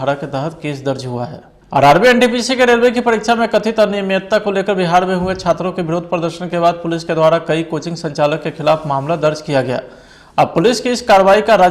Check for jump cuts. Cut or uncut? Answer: cut